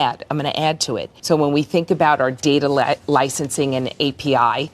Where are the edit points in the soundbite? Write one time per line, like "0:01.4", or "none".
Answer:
0:01.1